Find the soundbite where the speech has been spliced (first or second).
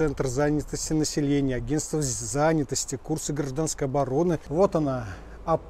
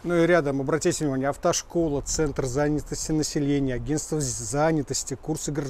first